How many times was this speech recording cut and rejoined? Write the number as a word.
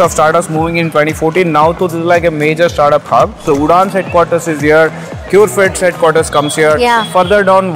one